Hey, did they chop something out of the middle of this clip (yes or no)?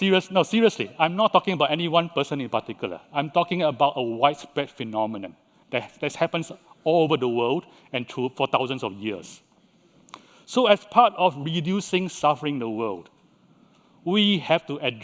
yes